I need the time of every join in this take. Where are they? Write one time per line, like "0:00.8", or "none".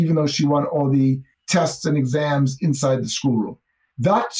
0:01.3